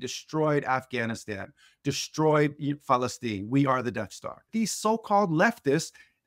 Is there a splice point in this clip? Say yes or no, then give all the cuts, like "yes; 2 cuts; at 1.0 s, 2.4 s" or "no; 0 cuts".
yes; 1 cut; at 4.5 s